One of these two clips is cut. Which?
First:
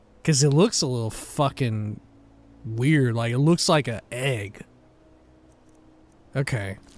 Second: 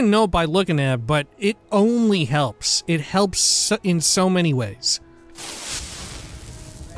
first; 1 cut; at 4.7 s

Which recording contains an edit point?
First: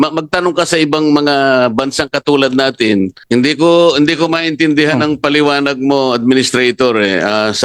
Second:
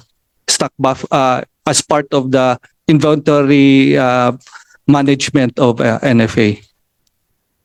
first; 1 cut; at 3.2 s

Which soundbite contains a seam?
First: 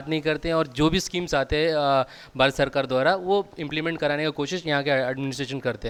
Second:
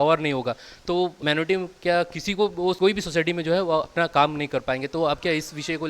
second; 2 cuts; at 1.2 s, 2.8 s

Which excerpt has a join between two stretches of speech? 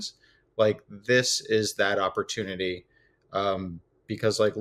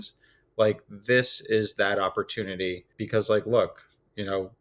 second; 1 cut; at 2.9 s

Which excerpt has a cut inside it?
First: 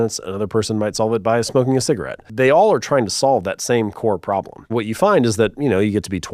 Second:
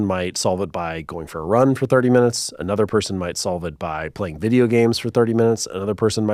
first; 2 cuts; at 2.2 s, 4.7 s

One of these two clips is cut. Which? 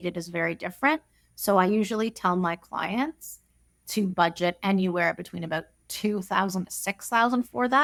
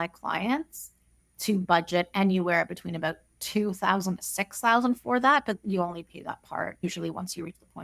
second; 1 cut; at 6.8 s

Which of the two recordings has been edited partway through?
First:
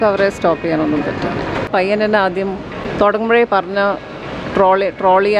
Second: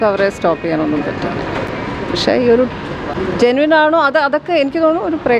first; 2 cuts; at 1.7 s, 2.8 s

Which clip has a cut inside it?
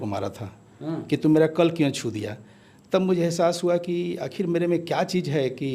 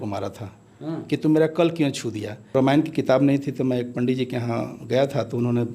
second; 1 cut; at 2.5 s

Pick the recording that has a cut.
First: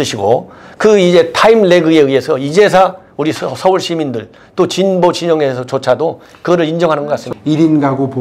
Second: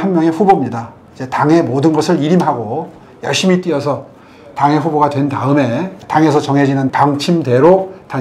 first; 1 cut; at 7.3 s

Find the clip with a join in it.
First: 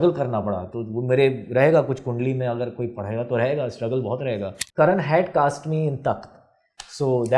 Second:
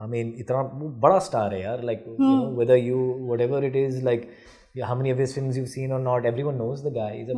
first; 1 cut; at 4.6 s

